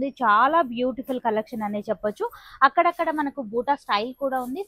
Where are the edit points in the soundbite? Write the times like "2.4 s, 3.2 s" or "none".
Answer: none